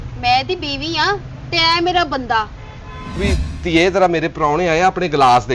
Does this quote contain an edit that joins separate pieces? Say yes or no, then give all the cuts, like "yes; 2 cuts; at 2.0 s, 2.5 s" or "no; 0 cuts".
yes; 1 cut; at 3.2 s